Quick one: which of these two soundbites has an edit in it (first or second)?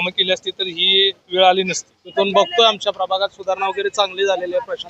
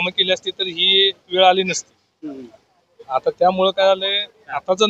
first